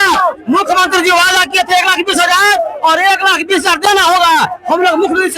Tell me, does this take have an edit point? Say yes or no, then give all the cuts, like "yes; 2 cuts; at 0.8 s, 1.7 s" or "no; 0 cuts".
no; 0 cuts